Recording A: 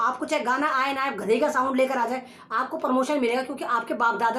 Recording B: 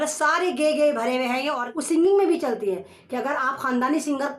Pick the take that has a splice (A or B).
B